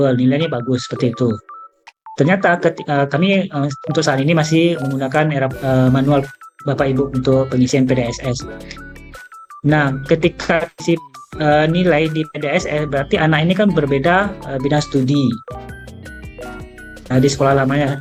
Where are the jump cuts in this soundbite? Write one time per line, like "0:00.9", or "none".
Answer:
none